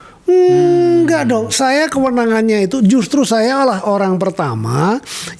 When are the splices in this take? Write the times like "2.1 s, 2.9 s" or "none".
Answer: none